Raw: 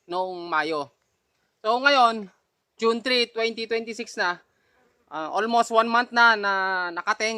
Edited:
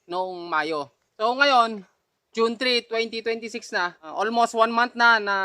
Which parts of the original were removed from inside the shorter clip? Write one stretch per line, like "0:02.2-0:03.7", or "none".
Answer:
0:01.0-0:01.5
0:04.5-0:05.2